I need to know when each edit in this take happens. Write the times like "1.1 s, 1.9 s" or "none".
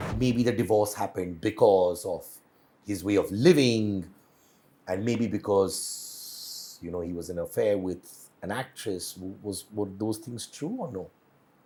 none